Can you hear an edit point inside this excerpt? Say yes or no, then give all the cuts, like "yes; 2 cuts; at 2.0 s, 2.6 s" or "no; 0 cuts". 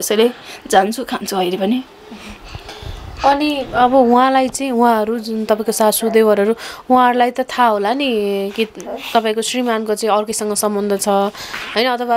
no; 0 cuts